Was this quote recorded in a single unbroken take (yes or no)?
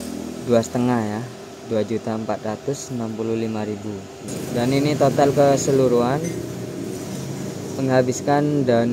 no